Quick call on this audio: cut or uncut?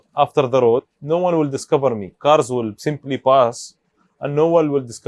cut